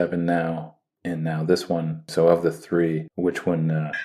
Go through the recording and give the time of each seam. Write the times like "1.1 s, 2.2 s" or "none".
2.0 s, 3.1 s